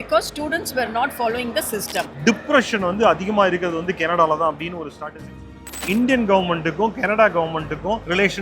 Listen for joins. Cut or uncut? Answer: cut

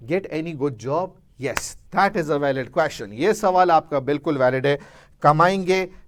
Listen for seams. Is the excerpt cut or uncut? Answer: uncut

